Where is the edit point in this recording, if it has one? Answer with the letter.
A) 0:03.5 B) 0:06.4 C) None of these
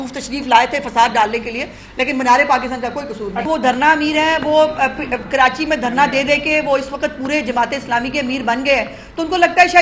A